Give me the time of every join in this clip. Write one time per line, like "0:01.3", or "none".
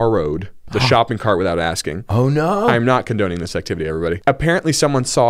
none